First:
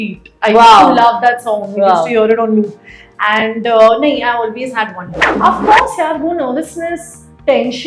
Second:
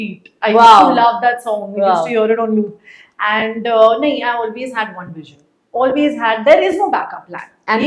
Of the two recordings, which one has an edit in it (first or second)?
first